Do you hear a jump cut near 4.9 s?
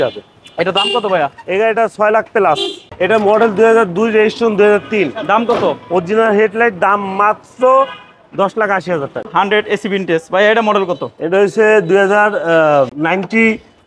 no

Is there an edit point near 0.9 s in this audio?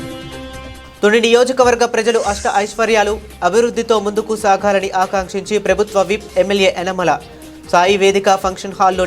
yes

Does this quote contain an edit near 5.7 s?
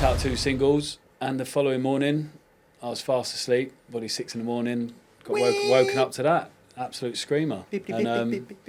no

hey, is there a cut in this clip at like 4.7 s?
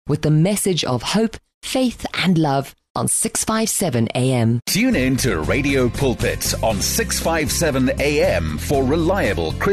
yes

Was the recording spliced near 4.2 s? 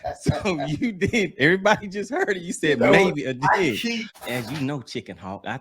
yes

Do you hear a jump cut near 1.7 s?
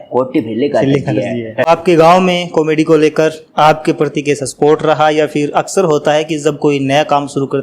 yes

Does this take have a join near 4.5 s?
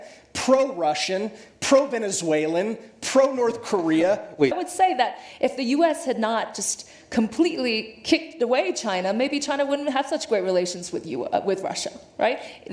yes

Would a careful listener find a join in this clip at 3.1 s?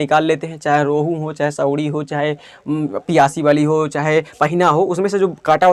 no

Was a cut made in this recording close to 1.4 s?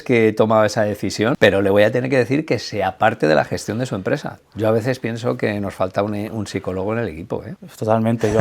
yes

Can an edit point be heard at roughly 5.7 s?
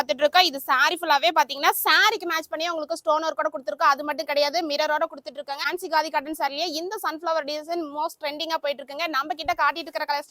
yes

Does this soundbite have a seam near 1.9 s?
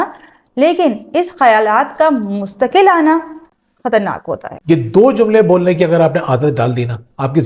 no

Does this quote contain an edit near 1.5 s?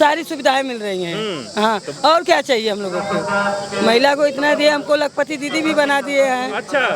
no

